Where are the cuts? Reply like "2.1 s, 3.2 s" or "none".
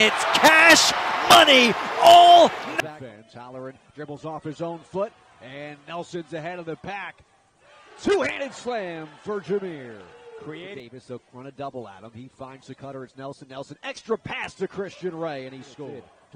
none